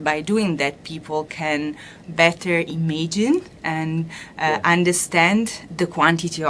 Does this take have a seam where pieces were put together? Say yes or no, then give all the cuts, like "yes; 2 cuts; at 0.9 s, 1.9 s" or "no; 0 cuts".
no; 0 cuts